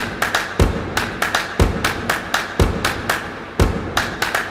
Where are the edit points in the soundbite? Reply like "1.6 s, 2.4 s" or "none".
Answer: none